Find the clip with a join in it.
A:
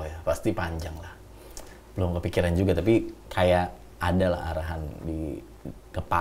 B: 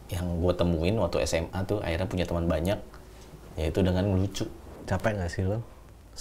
B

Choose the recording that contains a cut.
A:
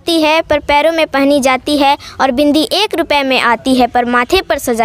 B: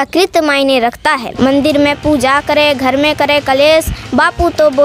B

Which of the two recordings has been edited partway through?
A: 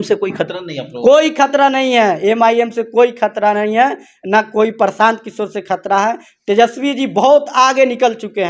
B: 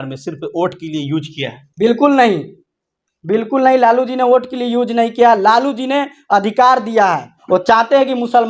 B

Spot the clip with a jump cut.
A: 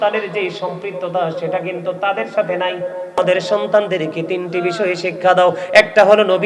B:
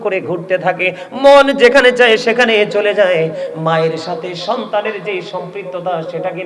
A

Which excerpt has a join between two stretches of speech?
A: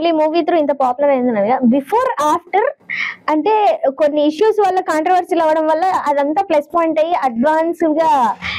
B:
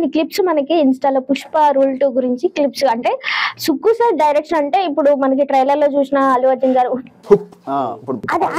B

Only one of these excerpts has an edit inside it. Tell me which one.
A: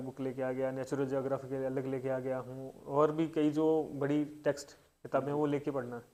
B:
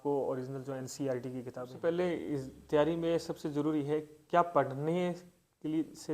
B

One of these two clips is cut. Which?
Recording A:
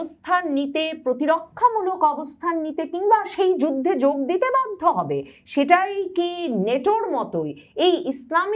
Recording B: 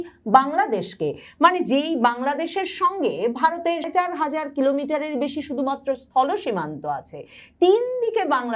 B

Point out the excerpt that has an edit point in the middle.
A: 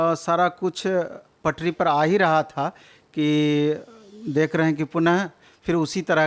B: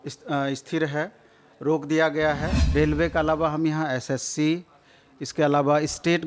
B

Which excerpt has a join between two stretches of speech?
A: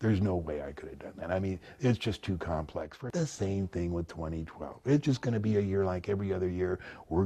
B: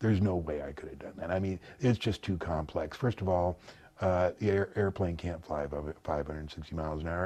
A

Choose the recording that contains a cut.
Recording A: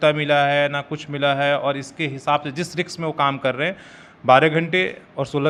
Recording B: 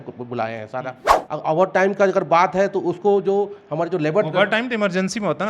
B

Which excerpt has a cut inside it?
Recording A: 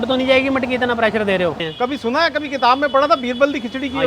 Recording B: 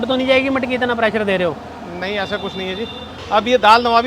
A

